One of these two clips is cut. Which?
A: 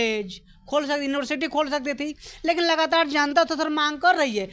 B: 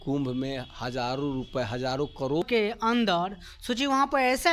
B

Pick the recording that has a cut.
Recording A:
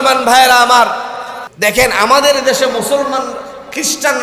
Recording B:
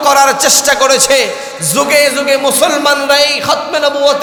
A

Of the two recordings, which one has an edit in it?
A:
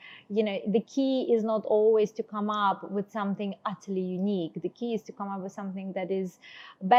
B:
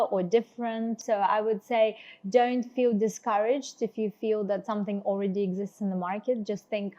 B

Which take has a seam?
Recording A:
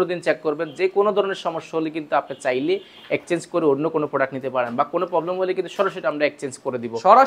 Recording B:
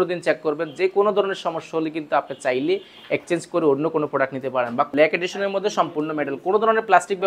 B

